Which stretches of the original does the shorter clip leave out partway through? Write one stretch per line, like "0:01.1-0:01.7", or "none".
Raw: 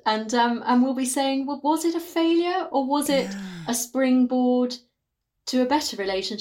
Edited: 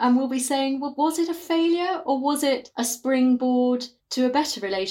0:03.3-0:03.6
0:04.9-0:05.3

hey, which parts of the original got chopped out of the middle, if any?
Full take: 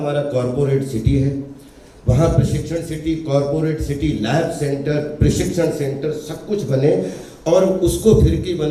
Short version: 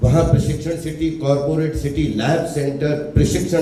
none

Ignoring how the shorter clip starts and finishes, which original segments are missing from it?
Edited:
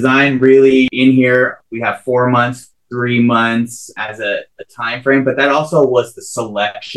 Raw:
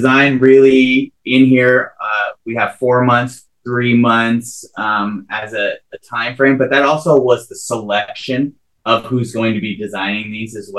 0:00.9-0:01.2
0:02.0-0:02.4
0:04.7-0:05.3

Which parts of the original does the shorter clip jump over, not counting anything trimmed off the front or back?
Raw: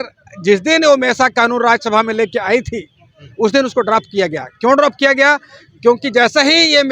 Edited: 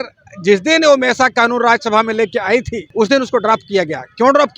0:02.8-0:03.2

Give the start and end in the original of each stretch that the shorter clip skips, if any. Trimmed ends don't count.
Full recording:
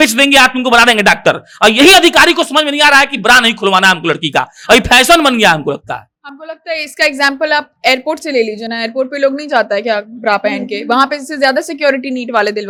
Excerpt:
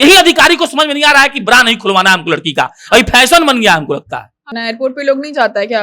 0:06.3-0:08.7

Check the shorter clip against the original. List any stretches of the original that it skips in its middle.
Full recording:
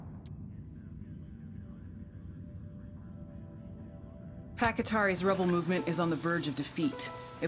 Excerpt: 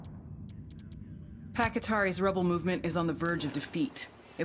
0:01.5-0:04.6

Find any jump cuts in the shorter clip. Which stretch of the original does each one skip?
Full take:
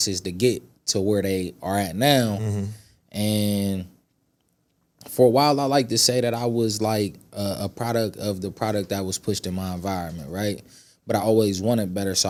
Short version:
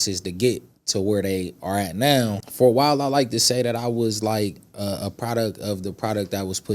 0:02.4-0:05.0

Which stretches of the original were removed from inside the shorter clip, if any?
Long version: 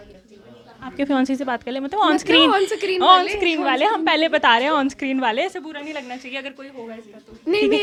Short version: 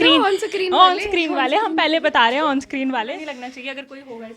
0:05.4-0:05.8

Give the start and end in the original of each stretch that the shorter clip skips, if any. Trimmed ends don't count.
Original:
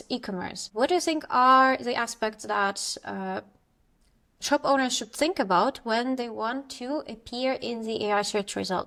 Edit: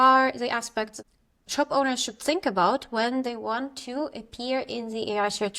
0:02.4-0:03.9

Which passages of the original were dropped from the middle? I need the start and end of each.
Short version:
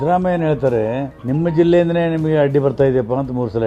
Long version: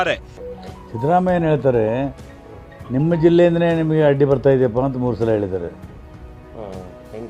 0:02.1-0:02.8

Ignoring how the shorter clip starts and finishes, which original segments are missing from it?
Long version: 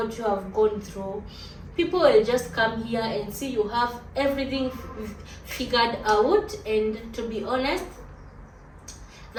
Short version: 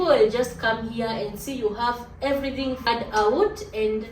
0:04.8-0:05.8

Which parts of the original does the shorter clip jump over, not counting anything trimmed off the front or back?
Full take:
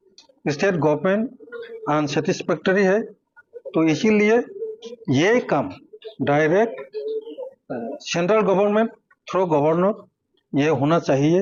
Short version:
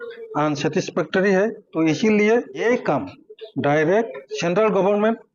0:03.1-0:03.6
0:04.6-0:05.3
0:06.9-0:08.0

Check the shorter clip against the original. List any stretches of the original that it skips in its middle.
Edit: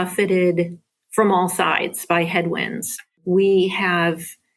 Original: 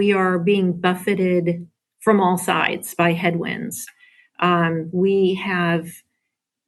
0:04.1-0:04.9

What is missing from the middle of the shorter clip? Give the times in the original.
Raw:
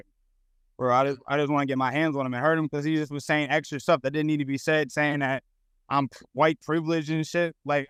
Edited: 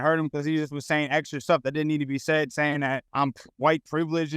0:05.4-0:05.8

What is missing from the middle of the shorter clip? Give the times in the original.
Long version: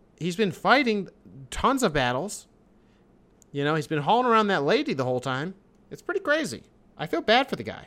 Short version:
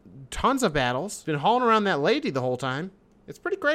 0:02.4-0:03.9

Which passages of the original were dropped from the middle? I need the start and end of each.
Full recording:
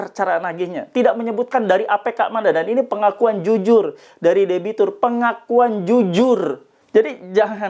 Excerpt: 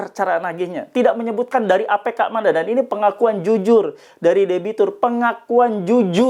none

